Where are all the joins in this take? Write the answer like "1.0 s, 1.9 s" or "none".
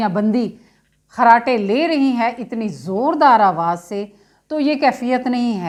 none